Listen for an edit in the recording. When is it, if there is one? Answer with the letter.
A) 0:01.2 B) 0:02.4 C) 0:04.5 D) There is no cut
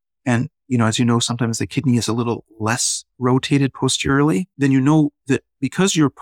C